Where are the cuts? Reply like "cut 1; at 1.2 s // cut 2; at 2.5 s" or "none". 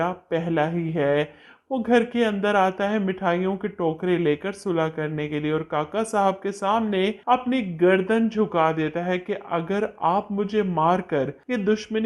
none